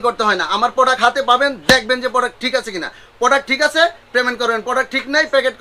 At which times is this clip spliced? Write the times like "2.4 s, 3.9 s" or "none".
none